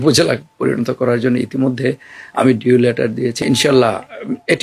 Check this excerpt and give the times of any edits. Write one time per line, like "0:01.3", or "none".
0:03.4